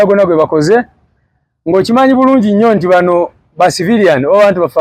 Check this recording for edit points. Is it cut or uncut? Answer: uncut